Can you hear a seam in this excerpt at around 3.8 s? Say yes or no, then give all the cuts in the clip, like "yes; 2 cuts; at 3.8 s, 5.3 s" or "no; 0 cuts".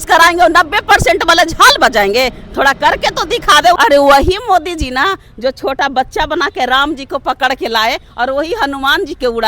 yes; 1 cut; at 3.8 s